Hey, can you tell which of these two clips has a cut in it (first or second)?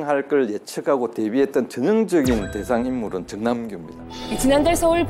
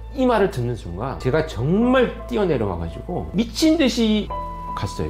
second